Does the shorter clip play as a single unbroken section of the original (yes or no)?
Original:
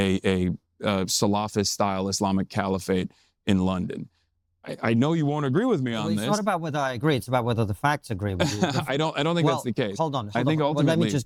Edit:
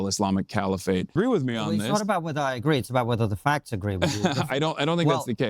no